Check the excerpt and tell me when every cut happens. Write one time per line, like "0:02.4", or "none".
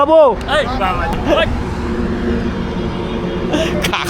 0:01.1